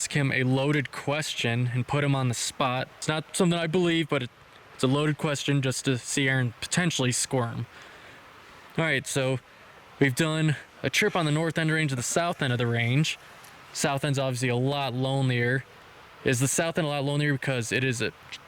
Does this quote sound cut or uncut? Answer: cut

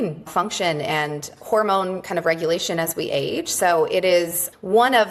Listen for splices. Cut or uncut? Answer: uncut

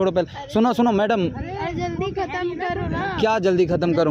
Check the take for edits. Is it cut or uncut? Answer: uncut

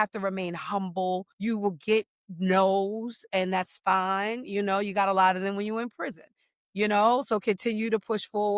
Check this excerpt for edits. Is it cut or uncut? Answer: cut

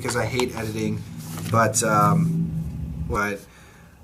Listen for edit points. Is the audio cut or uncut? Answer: uncut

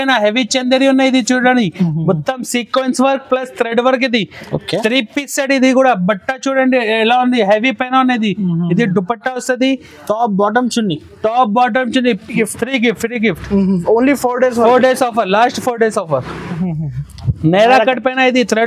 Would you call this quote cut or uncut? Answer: cut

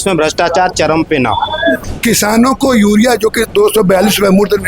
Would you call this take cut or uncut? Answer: cut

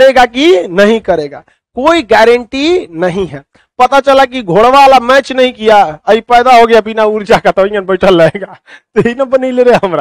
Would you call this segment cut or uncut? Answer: uncut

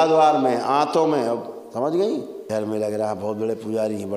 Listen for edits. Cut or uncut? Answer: cut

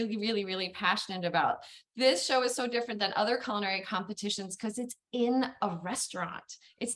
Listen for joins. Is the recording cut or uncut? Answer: uncut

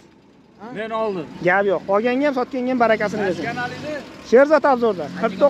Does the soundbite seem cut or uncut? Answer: uncut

